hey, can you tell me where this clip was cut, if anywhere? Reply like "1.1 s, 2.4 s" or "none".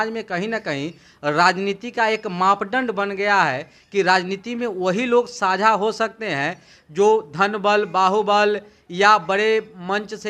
none

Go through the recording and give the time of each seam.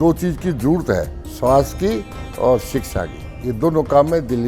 1.2 s

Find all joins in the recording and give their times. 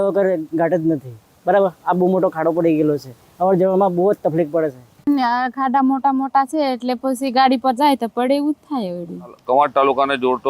4.9 s, 9.4 s

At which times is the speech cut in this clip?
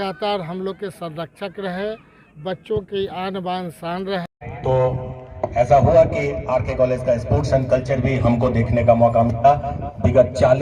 4.3 s

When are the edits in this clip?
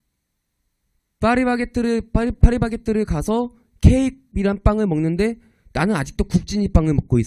2.6 s

